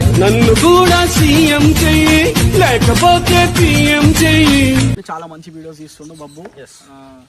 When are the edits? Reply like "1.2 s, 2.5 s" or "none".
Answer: 4.9 s